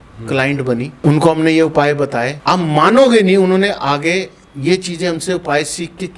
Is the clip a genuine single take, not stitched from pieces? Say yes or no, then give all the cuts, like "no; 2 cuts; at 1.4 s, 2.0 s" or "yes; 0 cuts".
no; 2 cuts; at 0.9 s, 2.3 s